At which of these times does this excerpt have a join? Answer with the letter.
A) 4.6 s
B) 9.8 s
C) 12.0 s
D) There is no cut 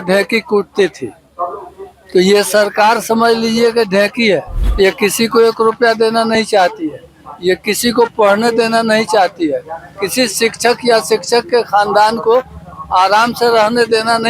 A